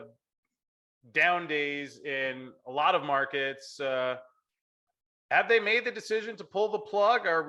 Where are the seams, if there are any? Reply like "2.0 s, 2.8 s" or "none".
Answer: none

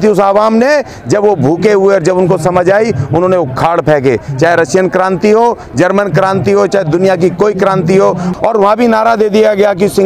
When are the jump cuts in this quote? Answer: 8.3 s

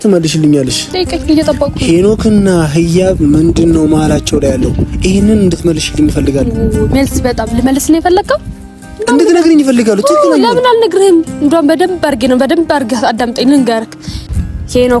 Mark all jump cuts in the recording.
none

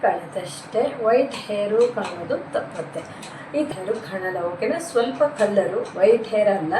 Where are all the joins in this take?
3.7 s

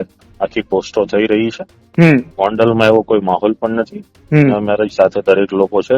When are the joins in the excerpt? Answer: none

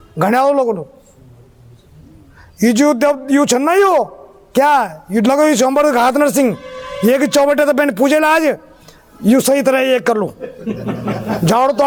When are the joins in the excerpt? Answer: none

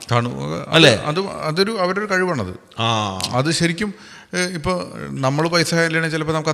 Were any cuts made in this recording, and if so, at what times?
none

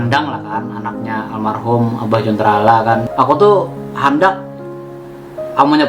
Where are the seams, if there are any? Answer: 3.1 s

